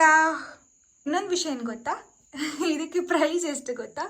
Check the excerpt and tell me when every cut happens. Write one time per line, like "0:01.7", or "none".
0:01.0